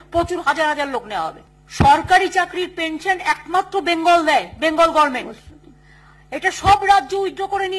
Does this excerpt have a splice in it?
yes; 1 cut; at 1.4 s

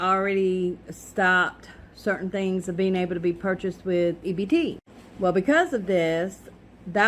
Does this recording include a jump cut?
no; 0 cuts

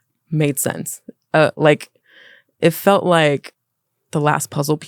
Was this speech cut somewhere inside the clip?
no; 0 cuts

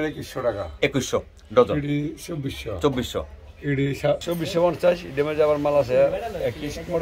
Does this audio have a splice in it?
yes; 1 cut; at 4.2 s

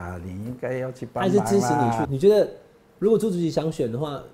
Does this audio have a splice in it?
yes; 1 cut; at 2.1 s

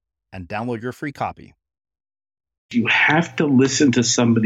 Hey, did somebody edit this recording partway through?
yes; 1 cut; at 2.7 s

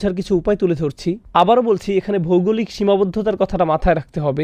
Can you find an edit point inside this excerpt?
no; 0 cuts

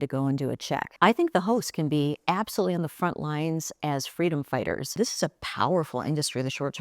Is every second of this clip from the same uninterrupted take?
no; 2 cuts; at 0.9 s, 4.9 s

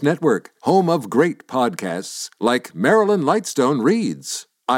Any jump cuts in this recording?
no; 0 cuts

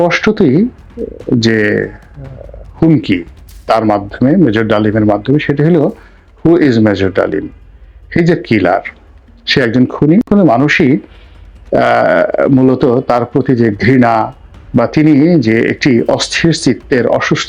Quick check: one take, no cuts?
no; 1 cut; at 10.3 s

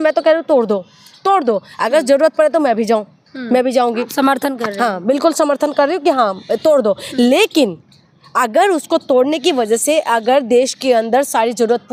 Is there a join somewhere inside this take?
no; 0 cuts

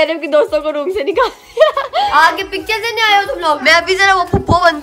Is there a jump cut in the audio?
yes; 2 cuts; at 2.1 s, 3.6 s

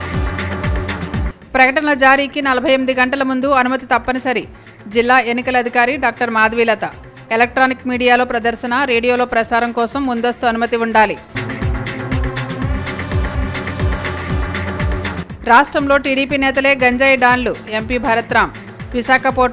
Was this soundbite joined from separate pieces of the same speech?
no; 0 cuts

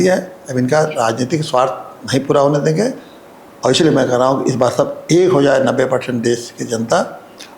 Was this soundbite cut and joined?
no; 0 cuts

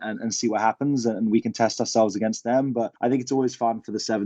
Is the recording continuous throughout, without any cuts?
no; 1 cut; at 2.9 s

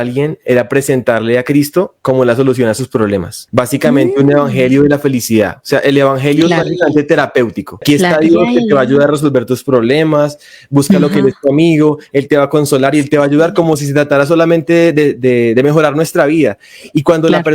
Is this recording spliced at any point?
yes; 2 cuts; at 3.4 s, 7.8 s

